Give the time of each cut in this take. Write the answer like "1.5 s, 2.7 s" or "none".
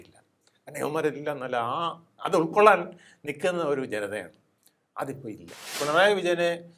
5.8 s